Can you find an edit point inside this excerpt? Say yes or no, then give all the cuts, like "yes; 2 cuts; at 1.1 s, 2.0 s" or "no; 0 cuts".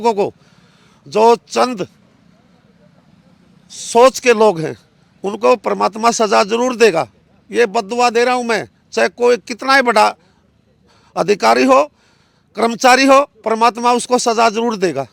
no; 0 cuts